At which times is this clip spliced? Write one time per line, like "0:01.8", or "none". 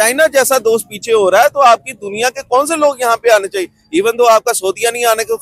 none